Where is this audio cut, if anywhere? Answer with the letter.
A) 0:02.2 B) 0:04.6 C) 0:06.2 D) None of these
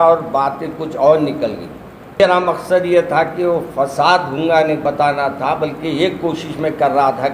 A